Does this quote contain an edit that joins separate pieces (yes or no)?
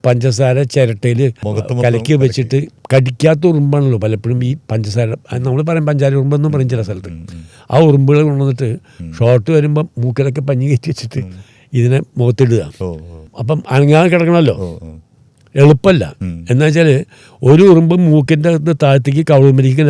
no